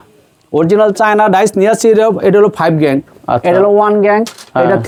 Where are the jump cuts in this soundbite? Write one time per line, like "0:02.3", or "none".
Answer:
none

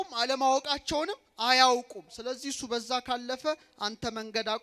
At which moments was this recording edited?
0:02.1

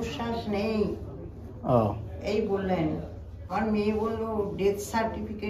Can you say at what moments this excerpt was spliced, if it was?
0:03.5

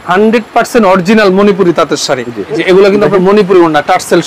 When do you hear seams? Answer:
0:02.6

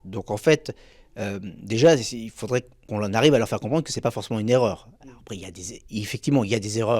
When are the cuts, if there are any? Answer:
0:02.8

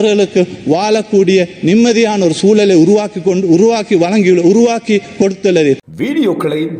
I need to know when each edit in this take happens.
0:05.9

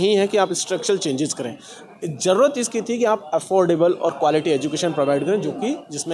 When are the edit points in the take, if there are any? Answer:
none

